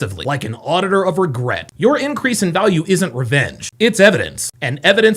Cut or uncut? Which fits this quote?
uncut